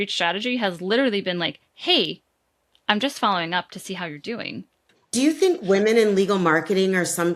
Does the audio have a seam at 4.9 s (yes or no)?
yes